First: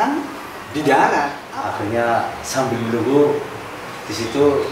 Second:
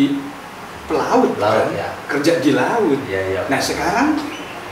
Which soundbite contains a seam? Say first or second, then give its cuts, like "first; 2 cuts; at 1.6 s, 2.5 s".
first; 1 cut; at 1.4 s